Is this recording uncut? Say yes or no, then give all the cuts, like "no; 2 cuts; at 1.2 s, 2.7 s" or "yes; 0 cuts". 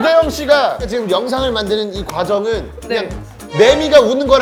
yes; 0 cuts